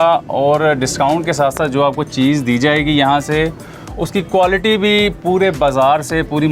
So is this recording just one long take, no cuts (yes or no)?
yes